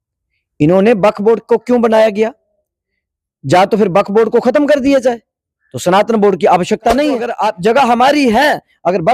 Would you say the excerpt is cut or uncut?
cut